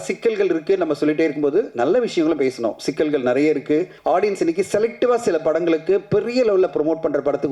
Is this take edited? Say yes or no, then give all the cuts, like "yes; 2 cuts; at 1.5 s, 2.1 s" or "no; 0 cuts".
yes; 1 cut; at 3.9 s